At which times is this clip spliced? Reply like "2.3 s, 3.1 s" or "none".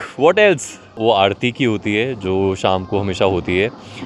0.9 s

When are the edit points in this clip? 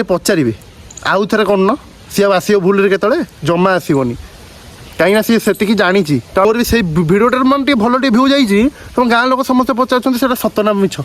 6.5 s

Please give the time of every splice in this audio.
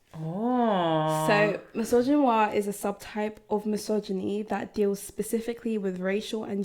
none

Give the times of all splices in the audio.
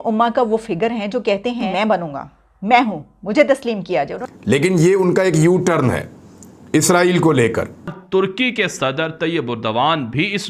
1.7 s, 4.2 s, 8.0 s

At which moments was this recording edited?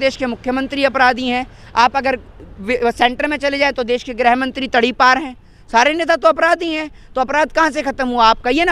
none

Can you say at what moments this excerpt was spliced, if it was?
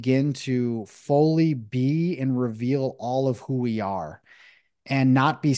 none

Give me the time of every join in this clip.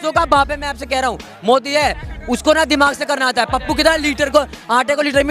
none

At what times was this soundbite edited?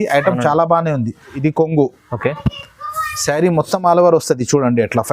1.4 s

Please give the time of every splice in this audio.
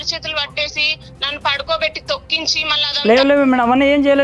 2.7 s

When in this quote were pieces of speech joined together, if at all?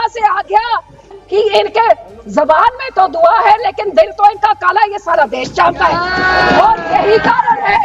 1.0 s

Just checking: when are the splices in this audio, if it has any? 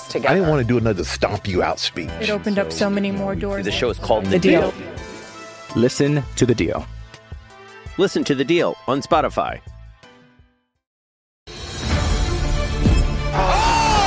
11.3 s

